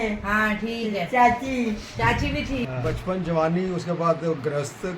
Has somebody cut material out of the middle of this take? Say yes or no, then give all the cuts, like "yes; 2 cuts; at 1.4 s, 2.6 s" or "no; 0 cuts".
yes; 1 cut; at 2.7 s